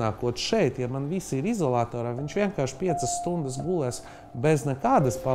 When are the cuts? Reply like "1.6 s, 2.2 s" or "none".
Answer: none